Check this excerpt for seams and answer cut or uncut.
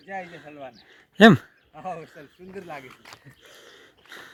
uncut